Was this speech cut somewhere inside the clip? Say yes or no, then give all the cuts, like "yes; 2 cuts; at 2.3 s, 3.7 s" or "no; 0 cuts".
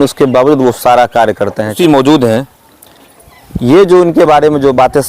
yes; 1 cut; at 1.7 s